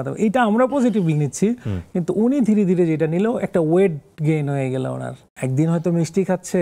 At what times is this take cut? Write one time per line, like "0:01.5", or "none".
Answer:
0:05.2